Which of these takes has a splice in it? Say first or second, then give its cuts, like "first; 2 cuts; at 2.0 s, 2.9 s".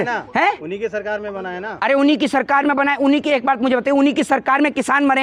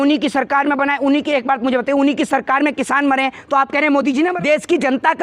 second; 1 cut; at 4.3 s